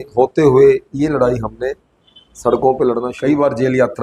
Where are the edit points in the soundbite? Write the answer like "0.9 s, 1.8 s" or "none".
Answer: 3.1 s